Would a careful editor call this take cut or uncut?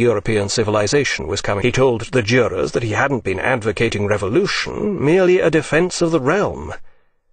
uncut